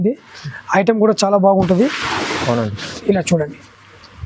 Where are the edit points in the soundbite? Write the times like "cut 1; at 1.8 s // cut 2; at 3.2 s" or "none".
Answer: none